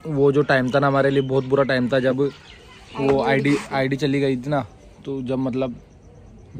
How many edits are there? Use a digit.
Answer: 0